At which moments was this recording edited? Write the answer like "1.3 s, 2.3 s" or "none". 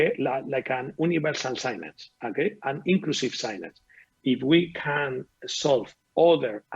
4.0 s